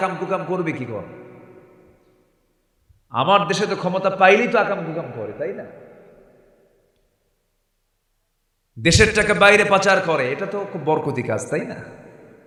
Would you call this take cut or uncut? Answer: uncut